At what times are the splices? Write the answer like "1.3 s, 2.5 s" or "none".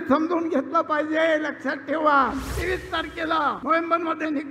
2.5 s, 3.6 s